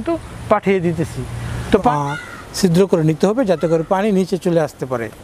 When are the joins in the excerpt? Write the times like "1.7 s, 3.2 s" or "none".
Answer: 1.9 s